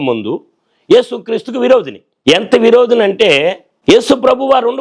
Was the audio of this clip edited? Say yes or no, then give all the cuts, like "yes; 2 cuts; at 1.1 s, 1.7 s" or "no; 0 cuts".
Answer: yes; 2 cuts; at 2.0 s, 3.7 s